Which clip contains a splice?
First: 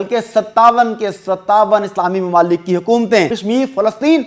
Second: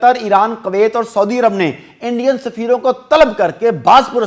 first; 1 cut; at 3.4 s

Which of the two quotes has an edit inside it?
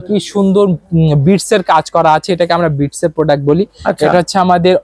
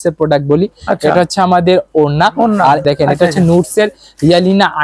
second; 1 cut; at 2.8 s

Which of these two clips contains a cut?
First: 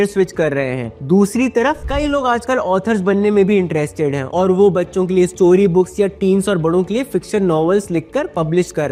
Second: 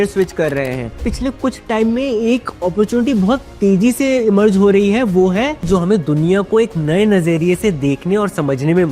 second; 2 cuts; at 1.0 s, 5.6 s

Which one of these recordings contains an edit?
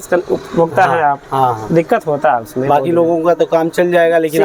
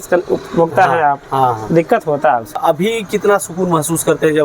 second; 1 cut; at 2.6 s

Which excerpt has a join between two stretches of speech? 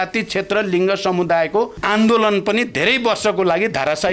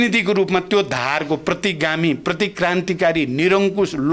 first; 1 cut; at 1.8 s

